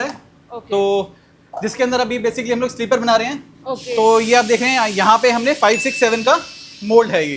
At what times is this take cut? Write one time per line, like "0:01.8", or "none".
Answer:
none